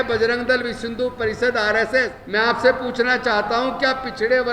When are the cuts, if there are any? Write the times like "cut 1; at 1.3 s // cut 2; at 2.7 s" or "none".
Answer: cut 1; at 2.2 s